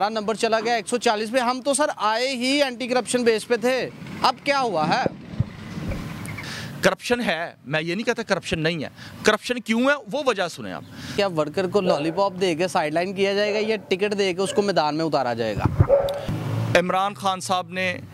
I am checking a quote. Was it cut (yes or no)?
yes